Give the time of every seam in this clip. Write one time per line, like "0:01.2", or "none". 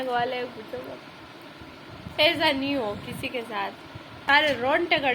0:02.1
0:04.1